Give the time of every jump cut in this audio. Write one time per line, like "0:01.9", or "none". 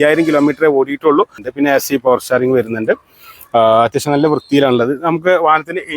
0:01.4